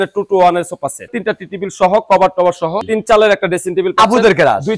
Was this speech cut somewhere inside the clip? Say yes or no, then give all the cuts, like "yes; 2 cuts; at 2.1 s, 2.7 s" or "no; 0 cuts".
yes; 2 cuts; at 1.1 s, 2.9 s